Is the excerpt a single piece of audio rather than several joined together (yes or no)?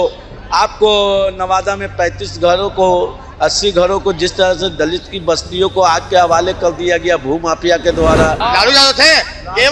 no